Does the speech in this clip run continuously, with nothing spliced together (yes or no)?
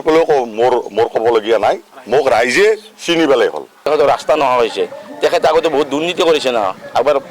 no